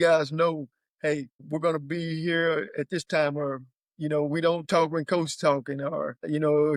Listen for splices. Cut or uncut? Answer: uncut